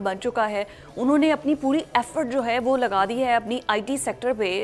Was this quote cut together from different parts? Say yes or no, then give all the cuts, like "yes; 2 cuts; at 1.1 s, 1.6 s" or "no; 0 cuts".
no; 0 cuts